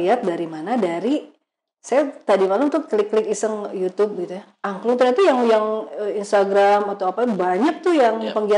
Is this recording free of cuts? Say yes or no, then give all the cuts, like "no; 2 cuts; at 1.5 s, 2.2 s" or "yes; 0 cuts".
yes; 0 cuts